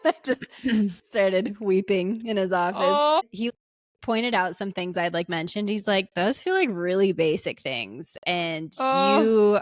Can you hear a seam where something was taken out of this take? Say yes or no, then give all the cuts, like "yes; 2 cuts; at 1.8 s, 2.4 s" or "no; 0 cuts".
yes; 1 cut; at 3.3 s